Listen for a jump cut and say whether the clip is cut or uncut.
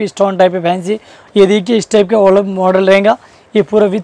cut